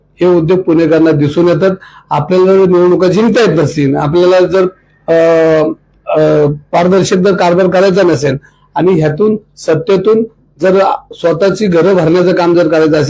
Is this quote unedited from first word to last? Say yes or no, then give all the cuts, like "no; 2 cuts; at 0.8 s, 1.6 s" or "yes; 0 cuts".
yes; 0 cuts